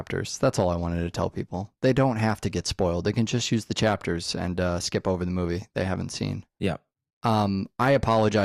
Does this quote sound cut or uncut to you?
uncut